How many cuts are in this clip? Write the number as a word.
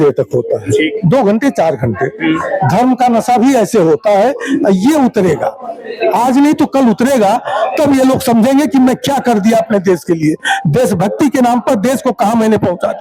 zero